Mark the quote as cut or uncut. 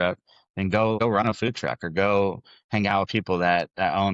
cut